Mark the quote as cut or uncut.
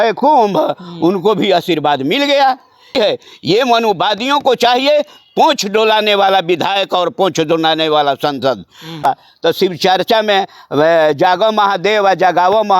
cut